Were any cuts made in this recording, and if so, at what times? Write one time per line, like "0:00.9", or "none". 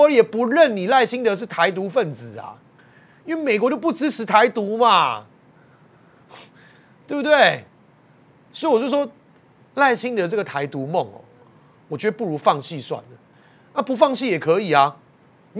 none